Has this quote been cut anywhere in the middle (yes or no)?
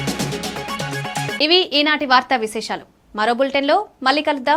no